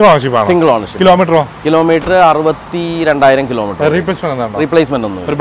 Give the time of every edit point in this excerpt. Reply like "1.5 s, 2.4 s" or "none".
none